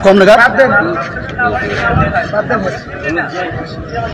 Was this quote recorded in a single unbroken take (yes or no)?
yes